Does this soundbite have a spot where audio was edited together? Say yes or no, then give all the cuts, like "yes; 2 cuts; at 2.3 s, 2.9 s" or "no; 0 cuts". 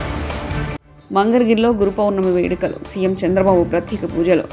no; 0 cuts